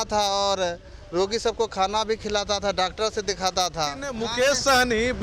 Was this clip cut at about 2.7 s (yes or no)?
no